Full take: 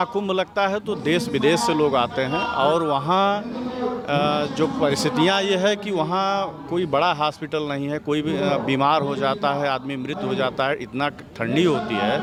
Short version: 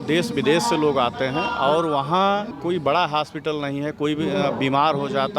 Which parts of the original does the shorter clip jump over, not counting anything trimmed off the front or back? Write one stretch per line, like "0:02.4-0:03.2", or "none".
0:03.5-0:06.6